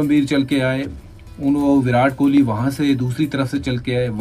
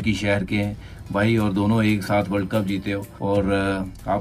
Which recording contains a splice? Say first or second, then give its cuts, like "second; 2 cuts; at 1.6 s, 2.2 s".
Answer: second; 1 cut; at 3.1 s